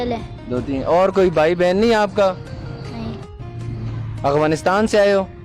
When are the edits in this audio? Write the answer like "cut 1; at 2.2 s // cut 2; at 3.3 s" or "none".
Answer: cut 1; at 3.3 s

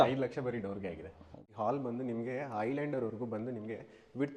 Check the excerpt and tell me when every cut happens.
cut 1; at 1.5 s

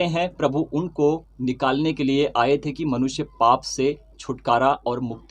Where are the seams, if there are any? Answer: none

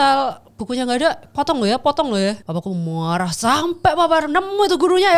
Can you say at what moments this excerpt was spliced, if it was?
cut 1; at 2.5 s

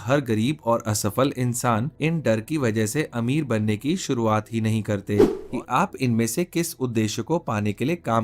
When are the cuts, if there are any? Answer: cut 1; at 1.9 s // cut 2; at 5.4 s

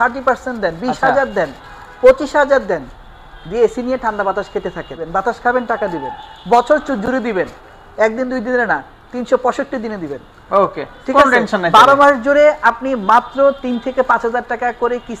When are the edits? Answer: cut 1; at 5.0 s

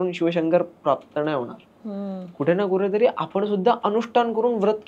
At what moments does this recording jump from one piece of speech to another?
none

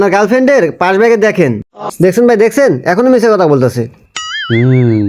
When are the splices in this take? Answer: cut 1; at 1.9 s

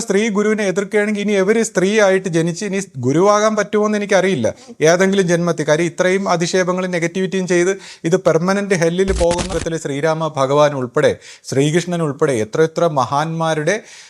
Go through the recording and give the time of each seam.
cut 1; at 9.6 s

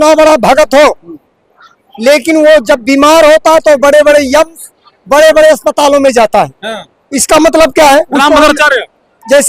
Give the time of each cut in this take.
none

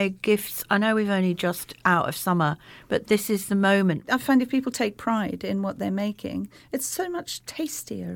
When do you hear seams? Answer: cut 1; at 4.1 s

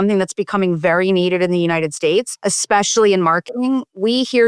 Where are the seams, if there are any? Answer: none

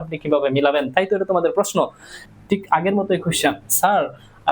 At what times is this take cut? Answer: cut 1; at 2.2 s

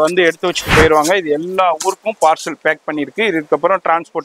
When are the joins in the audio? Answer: none

